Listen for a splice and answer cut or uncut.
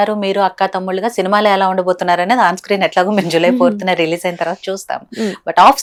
uncut